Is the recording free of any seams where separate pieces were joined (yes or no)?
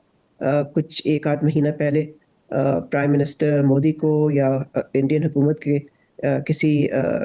yes